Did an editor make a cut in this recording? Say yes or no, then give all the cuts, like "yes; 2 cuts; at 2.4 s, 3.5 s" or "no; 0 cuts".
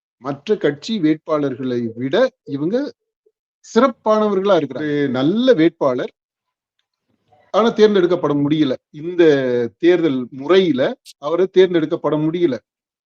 yes; 1 cut; at 4.9 s